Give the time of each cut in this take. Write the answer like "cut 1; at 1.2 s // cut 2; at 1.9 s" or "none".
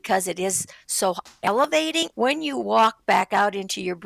cut 1; at 2.1 s